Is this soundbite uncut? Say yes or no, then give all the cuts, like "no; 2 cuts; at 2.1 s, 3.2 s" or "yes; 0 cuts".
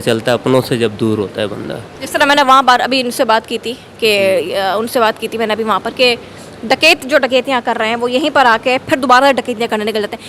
yes; 0 cuts